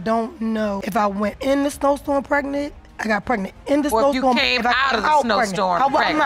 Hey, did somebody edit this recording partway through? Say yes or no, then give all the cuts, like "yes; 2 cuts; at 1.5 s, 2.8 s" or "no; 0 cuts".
no; 0 cuts